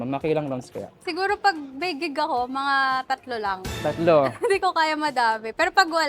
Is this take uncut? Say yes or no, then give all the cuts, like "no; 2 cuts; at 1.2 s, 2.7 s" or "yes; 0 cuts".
no; 1 cut; at 1.0 s